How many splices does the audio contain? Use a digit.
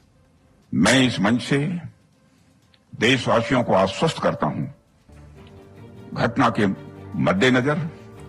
2